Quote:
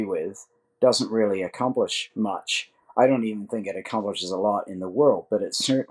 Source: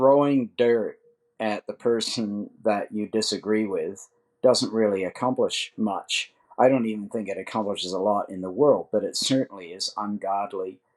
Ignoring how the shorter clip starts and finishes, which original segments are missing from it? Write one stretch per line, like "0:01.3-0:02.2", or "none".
none